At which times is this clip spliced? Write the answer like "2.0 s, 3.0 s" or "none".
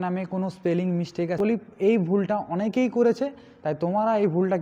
1.4 s